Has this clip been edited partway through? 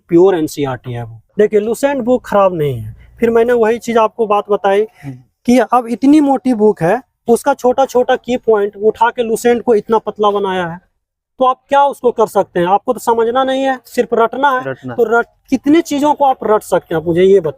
yes; 1 cut; at 1.2 s

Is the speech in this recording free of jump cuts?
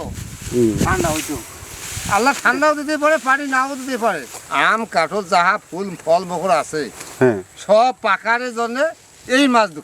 no; 1 cut; at 4.3 s

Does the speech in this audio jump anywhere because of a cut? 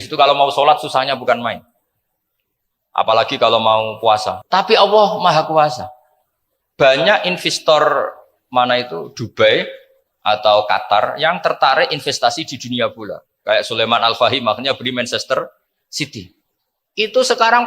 yes; 1 cut; at 4.3 s

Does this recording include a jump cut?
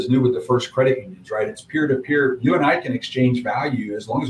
no; 0 cuts

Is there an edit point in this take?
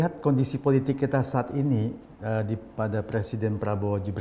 no; 0 cuts

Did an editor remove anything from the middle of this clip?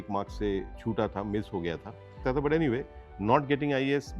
yes; 1 cut; at 2.1 s

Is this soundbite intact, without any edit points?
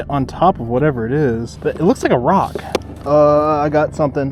no; 2 cuts; at 1.5 s, 2.9 s

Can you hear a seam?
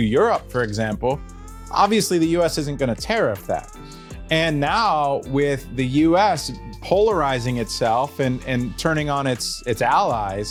no; 0 cuts

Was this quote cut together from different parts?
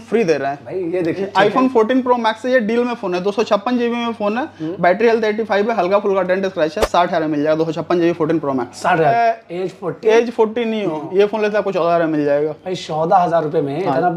yes; 2 cuts; at 1.2 s, 9.1 s

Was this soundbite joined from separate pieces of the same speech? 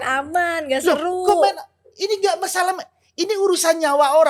no; 0 cuts

